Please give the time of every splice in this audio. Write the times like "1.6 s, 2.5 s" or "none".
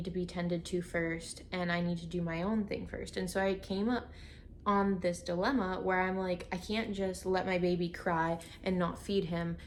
none